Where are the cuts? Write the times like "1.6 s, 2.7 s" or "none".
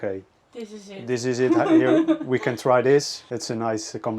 3.2 s